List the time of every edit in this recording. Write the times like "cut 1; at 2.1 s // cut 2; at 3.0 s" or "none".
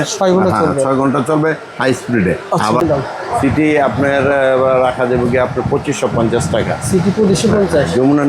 cut 1; at 2.8 s

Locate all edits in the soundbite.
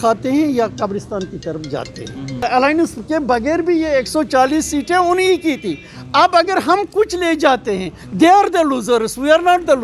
cut 1; at 2.4 s

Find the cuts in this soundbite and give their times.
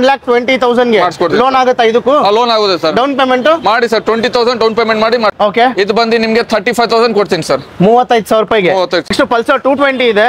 cut 1; at 5.3 s // cut 2; at 9.1 s

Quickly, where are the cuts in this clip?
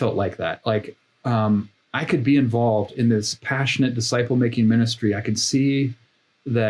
none

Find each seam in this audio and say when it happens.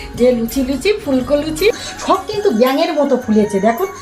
cut 1; at 1.7 s

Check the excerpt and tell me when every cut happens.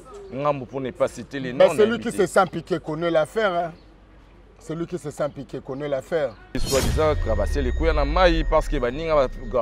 cut 1; at 6.6 s

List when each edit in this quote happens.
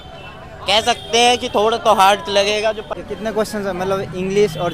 cut 1; at 2.9 s

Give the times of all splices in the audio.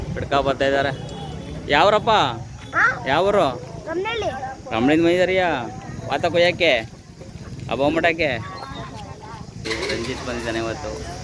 cut 1; at 9.5 s

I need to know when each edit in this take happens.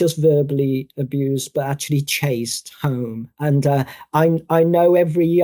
cut 1; at 3.3 s

